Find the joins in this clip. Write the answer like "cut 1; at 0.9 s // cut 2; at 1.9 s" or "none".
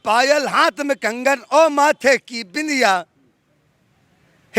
none